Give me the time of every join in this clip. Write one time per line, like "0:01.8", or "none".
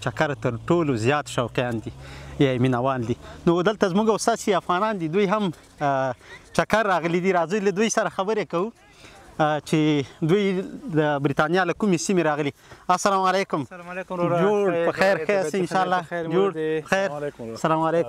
none